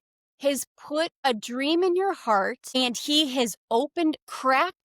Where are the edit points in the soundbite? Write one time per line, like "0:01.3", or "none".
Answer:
0:01.2
0:02.6